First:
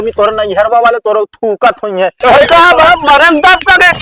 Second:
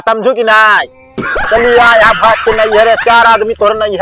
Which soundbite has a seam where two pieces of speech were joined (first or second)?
first